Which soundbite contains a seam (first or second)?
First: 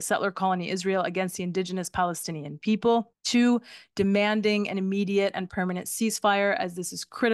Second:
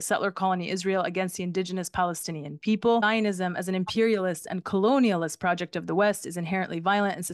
second